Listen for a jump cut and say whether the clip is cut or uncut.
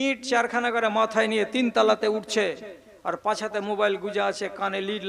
uncut